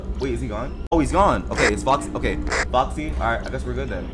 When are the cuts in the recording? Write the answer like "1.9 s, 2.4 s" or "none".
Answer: 0.9 s